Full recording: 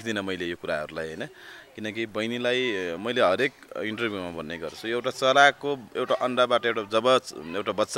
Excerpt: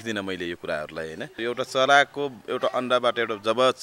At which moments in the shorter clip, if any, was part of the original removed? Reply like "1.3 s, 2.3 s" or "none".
1.3 s